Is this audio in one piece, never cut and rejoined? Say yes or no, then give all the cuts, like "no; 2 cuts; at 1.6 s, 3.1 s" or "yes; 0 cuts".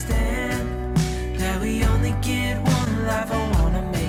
yes; 0 cuts